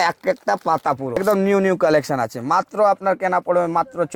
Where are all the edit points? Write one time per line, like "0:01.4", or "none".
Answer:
0:01.2